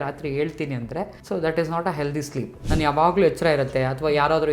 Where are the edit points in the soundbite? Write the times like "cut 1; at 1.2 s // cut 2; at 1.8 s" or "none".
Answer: cut 1; at 1.2 s // cut 2; at 2.5 s